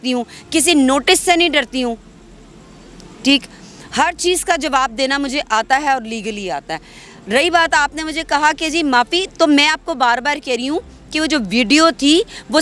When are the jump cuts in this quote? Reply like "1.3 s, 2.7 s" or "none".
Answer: none